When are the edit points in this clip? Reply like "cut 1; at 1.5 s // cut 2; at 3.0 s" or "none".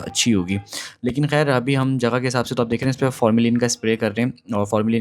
none